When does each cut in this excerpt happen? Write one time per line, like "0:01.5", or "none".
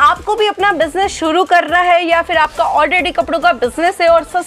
none